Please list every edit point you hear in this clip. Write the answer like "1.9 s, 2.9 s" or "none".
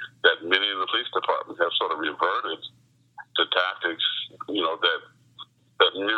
none

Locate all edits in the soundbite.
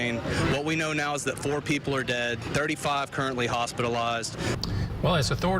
4.5 s

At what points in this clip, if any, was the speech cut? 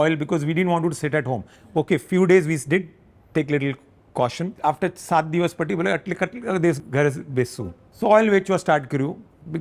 4.5 s, 6.8 s, 7.8 s

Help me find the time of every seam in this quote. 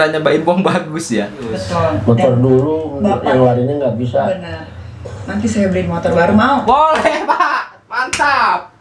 1.6 s

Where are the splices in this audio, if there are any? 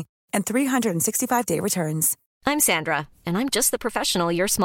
2.2 s

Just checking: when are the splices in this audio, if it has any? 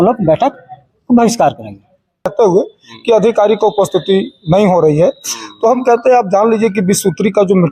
2.3 s

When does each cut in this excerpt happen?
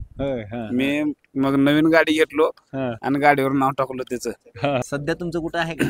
4.8 s

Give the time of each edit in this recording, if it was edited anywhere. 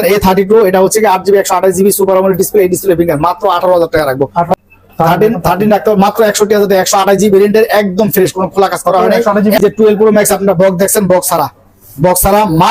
4.6 s, 9.6 s

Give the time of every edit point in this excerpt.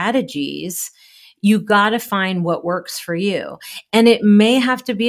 none

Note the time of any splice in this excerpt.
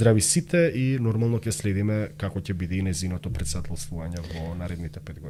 none

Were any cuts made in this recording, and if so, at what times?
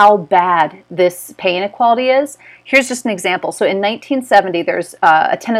none

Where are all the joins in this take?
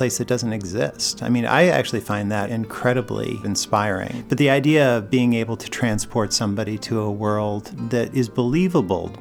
2.5 s, 3.9 s, 7.7 s

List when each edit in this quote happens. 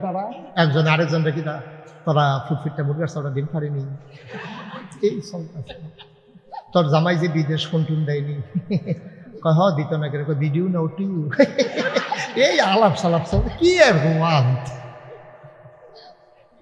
none

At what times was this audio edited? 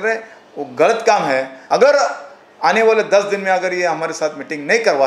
1.5 s

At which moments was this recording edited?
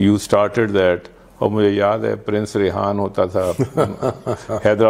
none

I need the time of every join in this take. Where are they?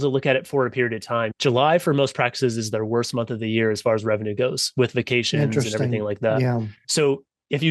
1.3 s

